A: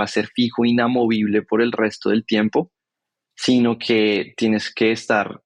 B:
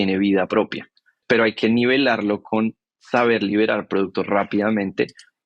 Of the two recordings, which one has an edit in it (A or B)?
B